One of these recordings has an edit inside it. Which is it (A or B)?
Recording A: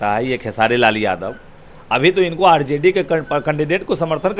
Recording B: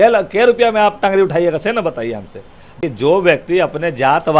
B